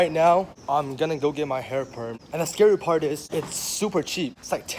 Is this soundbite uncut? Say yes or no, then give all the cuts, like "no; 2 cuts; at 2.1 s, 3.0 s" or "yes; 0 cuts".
yes; 0 cuts